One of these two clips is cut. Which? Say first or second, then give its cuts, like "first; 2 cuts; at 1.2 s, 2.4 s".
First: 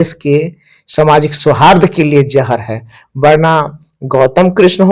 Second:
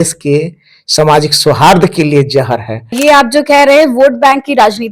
second; 1 cut; at 3.0 s